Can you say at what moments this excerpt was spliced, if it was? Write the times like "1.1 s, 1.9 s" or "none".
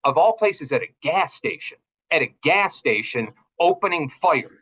none